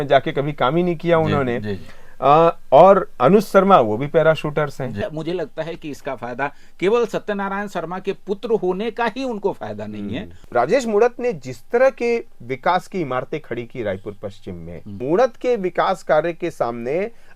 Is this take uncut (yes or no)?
no